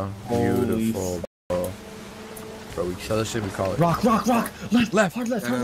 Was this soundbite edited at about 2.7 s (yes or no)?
yes